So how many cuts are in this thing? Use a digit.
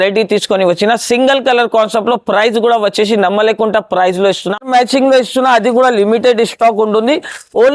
1